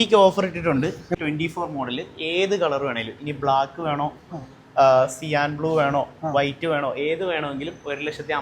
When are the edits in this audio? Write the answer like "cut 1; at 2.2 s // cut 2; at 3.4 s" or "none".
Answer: cut 1; at 1.1 s